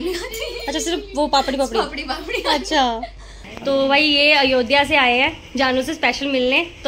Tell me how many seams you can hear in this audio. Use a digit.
1